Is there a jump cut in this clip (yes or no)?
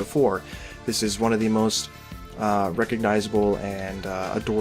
yes